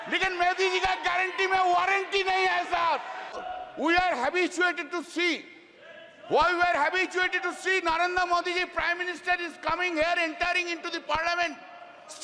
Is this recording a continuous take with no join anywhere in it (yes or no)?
no